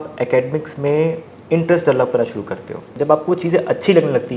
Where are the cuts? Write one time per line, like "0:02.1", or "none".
0:02.9